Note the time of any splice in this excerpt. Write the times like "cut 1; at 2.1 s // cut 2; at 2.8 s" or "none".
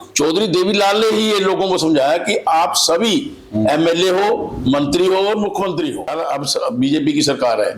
cut 1; at 6.1 s